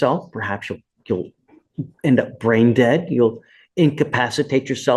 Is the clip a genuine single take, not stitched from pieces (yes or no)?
yes